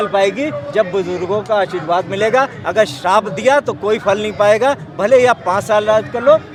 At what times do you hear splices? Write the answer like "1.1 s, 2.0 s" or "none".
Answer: none